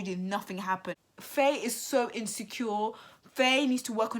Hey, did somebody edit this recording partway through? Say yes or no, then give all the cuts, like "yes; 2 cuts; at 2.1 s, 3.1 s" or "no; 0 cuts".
yes; 1 cut; at 0.9 s